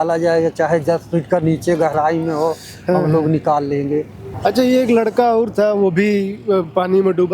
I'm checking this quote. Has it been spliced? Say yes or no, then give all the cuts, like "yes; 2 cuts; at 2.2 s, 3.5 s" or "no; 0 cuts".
yes; 1 cut; at 4.2 s